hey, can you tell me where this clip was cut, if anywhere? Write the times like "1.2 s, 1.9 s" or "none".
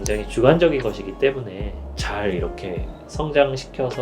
1.8 s